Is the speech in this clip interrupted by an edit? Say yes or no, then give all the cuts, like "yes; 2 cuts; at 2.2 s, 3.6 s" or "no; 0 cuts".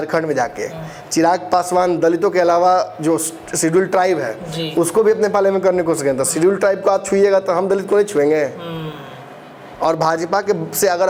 no; 0 cuts